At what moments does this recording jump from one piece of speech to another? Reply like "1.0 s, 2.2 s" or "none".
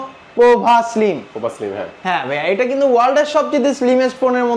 none